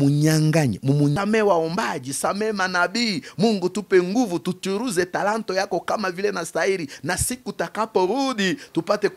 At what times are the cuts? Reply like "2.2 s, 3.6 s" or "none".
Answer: 1.1 s